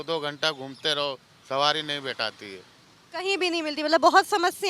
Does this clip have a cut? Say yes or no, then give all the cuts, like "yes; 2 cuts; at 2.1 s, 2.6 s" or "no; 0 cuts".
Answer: no; 0 cuts